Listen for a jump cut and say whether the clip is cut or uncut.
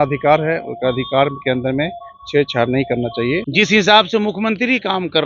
cut